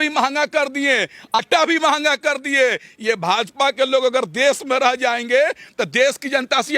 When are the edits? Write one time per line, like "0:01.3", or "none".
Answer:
0:01.4